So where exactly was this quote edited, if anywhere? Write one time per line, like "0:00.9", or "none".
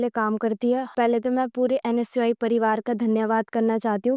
none